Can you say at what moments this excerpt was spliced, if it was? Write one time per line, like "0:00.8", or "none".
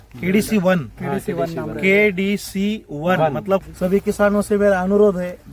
0:03.7